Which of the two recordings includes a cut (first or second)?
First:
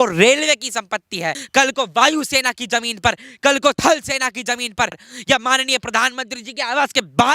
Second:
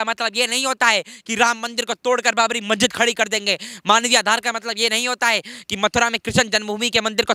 first